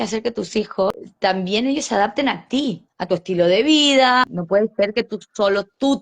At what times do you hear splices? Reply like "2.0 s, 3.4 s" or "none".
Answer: 1.1 s, 4.4 s